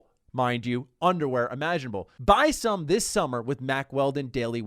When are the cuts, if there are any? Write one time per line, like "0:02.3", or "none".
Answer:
0:02.1